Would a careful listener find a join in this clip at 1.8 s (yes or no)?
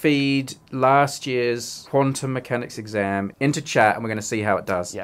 no